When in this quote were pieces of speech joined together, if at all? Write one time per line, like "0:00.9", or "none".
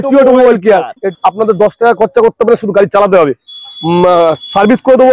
0:01.1